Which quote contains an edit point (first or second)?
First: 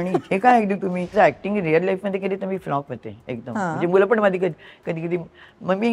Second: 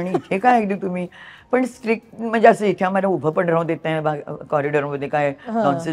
first